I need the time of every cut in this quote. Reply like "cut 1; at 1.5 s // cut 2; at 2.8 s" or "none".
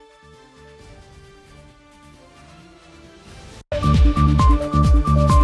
cut 1; at 3.6 s